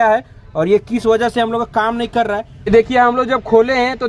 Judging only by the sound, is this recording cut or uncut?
cut